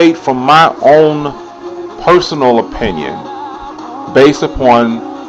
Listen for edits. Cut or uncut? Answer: cut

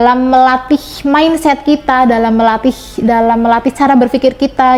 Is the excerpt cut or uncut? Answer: uncut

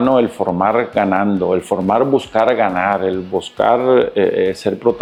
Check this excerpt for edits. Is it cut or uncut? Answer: uncut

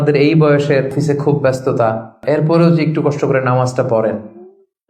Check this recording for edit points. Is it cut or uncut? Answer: cut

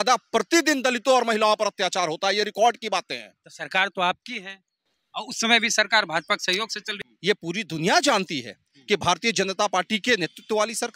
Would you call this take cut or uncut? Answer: cut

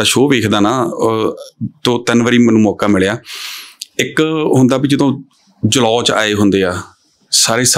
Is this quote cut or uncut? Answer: uncut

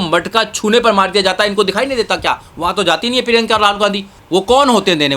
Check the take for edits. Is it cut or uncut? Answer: cut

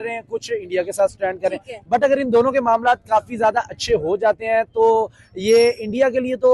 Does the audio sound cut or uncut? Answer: uncut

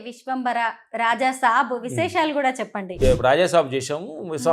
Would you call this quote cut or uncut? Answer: cut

